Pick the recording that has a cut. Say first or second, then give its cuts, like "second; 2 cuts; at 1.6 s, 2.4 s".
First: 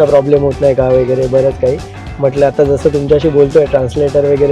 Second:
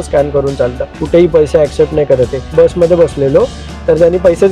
second; 2 cuts; at 0.9 s, 2.5 s